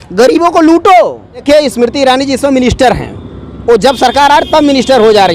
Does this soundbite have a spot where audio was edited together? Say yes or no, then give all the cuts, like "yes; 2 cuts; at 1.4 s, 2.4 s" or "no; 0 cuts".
yes; 1 cut; at 1.4 s